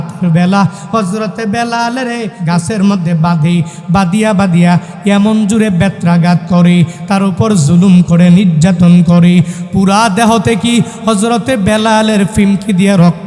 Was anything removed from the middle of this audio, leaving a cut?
yes; 1 cut; at 2.4 s

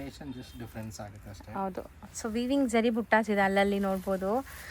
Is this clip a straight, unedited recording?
yes; 0 cuts

